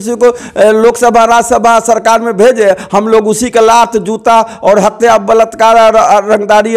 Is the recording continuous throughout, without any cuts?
yes; 0 cuts

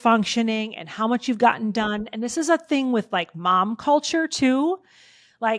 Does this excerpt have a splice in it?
no; 0 cuts

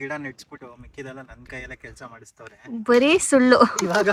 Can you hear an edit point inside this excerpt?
no; 0 cuts

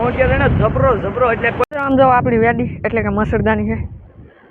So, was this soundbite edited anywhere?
yes; 1 cut; at 1.7 s

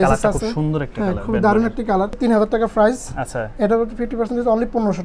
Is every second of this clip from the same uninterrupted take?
no; 1 cut; at 2.2 s

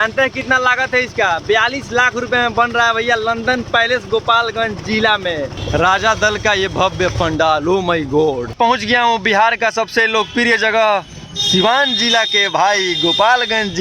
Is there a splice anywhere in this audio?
yes; 2 cuts; at 5.6 s, 8.5 s

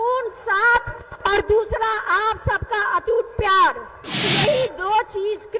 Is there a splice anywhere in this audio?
yes; 1 cut; at 4.2 s

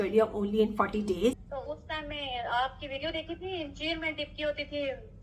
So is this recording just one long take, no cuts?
no; 1 cut; at 1.5 s

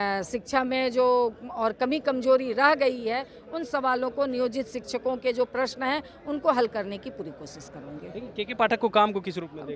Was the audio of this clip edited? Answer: no; 0 cuts

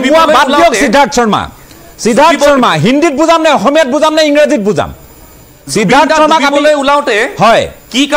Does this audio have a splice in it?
no; 0 cuts

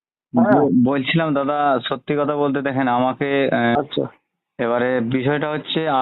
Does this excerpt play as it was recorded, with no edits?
no; 1 cut; at 3.8 s

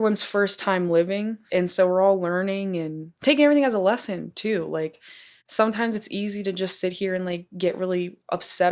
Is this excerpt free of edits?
no; 1 cut; at 1.4 s

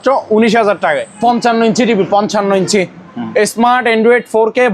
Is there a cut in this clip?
yes; 1 cut; at 1.1 s

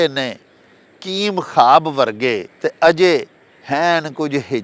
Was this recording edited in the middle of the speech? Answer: yes; 1 cut; at 2.5 s

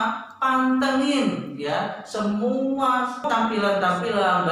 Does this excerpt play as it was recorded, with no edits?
no; 1 cut; at 3.3 s

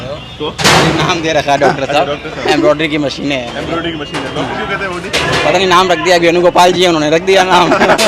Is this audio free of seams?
yes; 0 cuts

